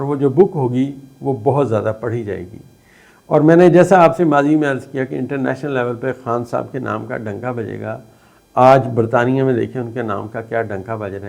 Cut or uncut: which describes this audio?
uncut